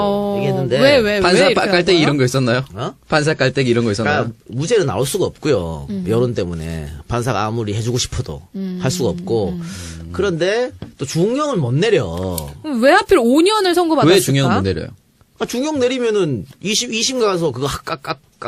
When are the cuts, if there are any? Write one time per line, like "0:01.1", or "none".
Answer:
none